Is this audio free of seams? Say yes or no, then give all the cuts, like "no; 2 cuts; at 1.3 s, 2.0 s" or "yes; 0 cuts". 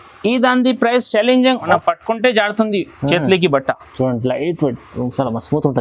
no; 1 cut; at 1.6 s